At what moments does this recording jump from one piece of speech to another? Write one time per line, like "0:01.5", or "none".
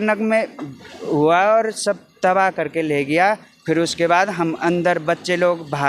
none